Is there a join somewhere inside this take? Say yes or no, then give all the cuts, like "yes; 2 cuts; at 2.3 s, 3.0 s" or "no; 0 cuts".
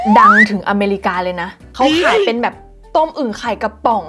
no; 0 cuts